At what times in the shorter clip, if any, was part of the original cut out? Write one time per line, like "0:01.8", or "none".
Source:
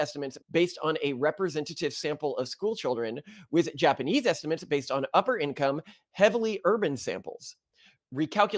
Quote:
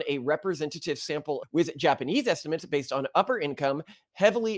0:01.4